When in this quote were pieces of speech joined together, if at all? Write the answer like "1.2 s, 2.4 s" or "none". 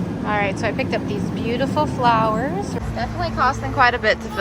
2.8 s